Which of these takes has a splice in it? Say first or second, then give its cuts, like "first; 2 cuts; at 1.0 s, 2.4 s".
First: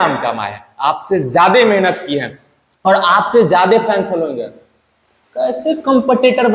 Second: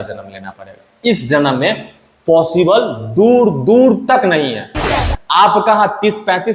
second; 1 cut; at 4.9 s